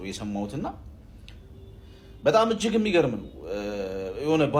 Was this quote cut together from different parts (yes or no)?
no